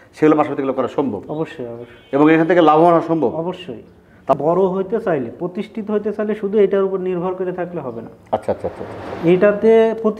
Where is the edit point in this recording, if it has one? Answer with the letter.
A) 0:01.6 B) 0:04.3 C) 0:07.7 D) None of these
B